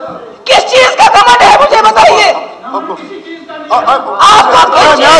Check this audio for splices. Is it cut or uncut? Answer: uncut